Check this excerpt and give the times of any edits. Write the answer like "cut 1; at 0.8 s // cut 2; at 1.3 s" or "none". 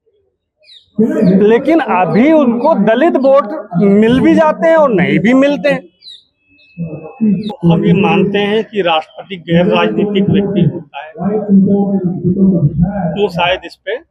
cut 1; at 7.5 s